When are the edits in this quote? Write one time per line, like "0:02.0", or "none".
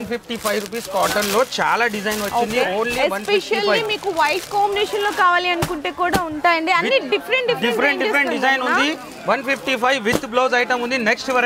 none

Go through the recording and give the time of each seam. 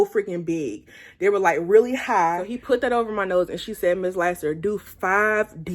0:02.5

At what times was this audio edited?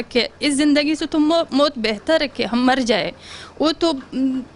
none

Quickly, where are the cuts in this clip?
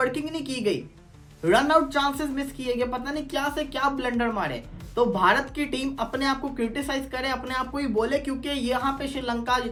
none

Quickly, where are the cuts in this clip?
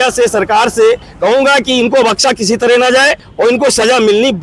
0:01.1
0:03.2

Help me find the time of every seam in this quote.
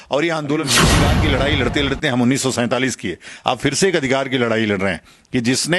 0:00.9

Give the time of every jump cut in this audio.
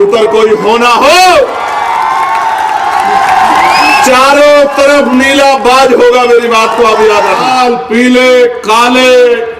0:07.5

